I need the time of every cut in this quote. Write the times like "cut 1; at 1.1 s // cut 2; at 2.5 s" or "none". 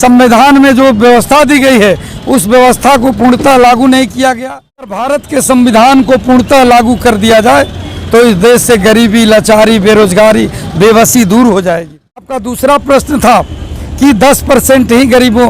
cut 1; at 5.0 s // cut 2; at 12.4 s